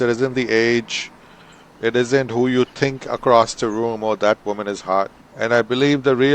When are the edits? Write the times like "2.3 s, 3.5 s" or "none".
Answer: 5.2 s